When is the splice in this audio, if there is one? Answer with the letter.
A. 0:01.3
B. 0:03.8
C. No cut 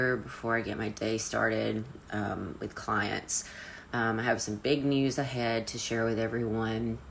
C